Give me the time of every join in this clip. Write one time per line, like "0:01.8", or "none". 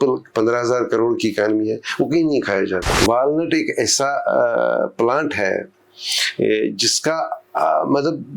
0:02.9